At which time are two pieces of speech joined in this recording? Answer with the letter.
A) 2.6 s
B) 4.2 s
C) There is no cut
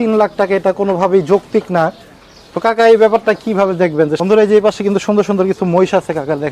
B